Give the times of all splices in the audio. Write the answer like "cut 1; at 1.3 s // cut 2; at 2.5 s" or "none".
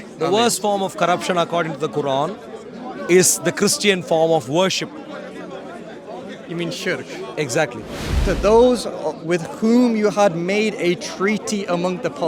cut 1; at 8.1 s